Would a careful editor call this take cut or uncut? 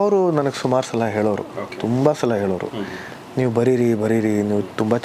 uncut